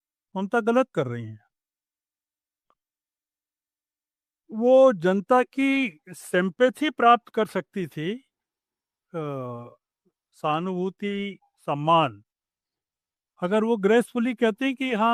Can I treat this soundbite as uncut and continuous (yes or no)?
yes